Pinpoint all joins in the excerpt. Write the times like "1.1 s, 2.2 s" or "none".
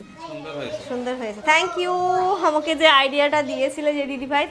none